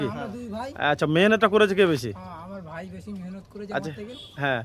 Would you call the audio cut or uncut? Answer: uncut